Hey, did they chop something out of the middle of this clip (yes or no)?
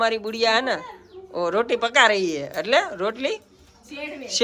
no